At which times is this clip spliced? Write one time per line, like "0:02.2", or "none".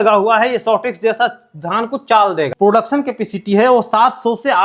0:02.5